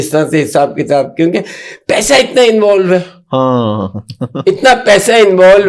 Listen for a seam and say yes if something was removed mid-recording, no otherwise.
no